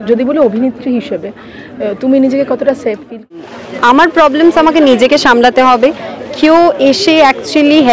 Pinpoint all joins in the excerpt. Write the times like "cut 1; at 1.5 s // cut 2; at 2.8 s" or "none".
cut 1; at 3.4 s